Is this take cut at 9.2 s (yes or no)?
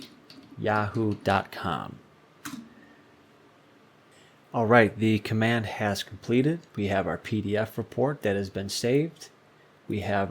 no